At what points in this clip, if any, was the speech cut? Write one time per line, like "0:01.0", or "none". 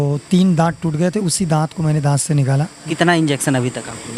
0:02.9

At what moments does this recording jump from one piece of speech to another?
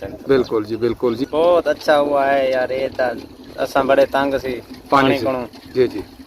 0:01.2

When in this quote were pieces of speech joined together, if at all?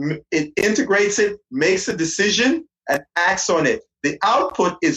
0:03.1

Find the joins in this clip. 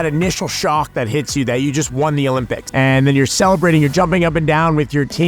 0:02.6

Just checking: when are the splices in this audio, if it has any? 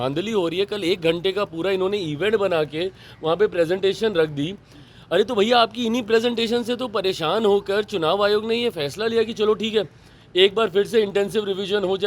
none

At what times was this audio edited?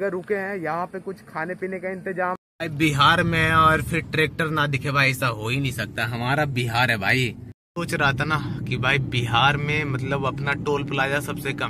0:02.5
0:07.7

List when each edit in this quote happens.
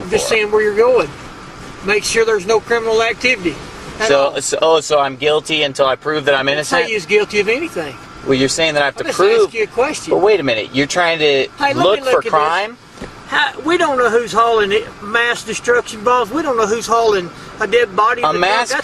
0:08.3

